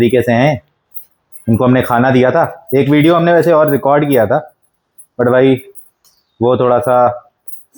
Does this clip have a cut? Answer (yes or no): no